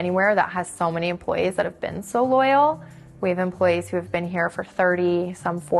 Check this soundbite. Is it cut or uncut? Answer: uncut